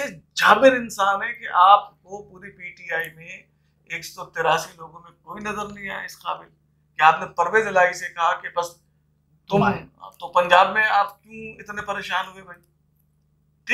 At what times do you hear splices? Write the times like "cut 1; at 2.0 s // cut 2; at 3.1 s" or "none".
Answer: none